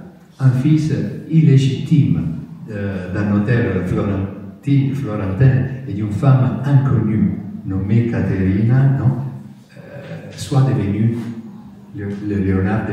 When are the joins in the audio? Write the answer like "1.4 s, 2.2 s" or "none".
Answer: none